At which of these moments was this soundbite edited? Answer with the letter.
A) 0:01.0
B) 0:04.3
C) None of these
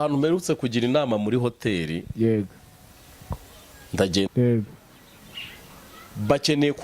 B